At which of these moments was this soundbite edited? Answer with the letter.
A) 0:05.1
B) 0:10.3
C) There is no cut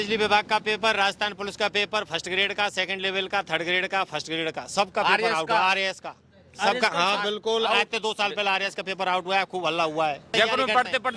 B